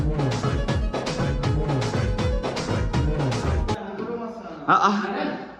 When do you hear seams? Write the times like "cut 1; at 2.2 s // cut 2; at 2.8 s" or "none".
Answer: cut 1; at 3.8 s